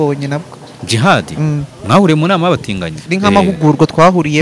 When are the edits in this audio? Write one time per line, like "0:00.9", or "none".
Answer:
0:03.0